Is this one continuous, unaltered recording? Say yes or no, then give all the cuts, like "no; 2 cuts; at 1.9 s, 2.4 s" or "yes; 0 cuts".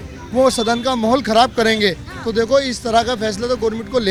yes; 0 cuts